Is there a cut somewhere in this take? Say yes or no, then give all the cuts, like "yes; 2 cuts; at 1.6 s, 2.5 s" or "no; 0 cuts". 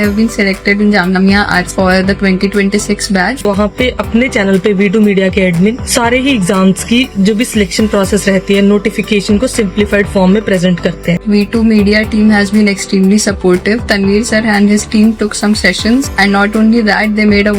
yes; 2 cuts; at 3.4 s, 11.2 s